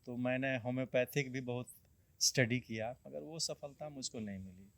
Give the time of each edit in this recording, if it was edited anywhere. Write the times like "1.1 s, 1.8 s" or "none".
3.1 s